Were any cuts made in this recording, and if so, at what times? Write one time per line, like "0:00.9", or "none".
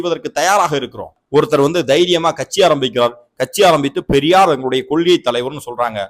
0:01.2